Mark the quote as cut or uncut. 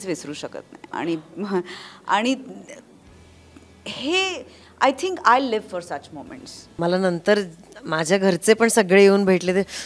cut